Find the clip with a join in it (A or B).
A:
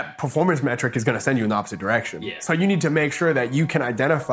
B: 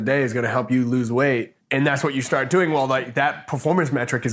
B